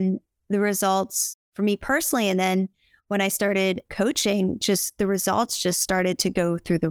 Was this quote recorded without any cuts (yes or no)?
yes